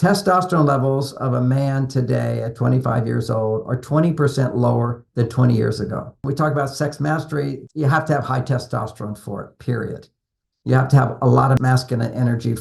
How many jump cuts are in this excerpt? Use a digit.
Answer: 3